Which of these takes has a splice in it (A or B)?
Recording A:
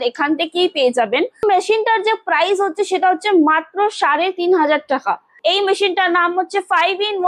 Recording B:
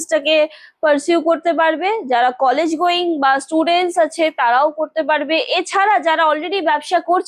A